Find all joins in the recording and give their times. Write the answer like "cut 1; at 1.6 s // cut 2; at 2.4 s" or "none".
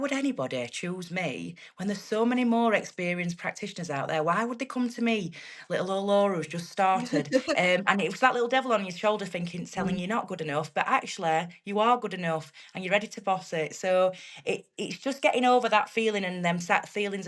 none